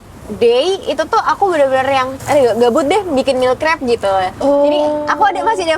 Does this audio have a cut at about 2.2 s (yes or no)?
yes